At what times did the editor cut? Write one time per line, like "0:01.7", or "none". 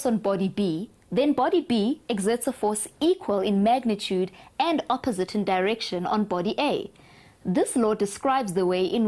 0:01.5